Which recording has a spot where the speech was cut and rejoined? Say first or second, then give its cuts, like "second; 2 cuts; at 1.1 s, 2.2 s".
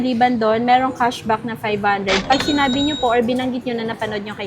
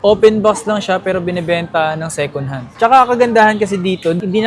second; 1 cut; at 2.6 s